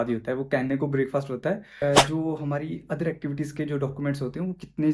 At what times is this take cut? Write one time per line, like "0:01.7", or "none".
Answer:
0:01.7